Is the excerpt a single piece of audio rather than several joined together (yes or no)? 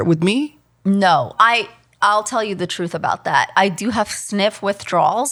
yes